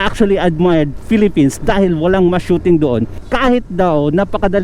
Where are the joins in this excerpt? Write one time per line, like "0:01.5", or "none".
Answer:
none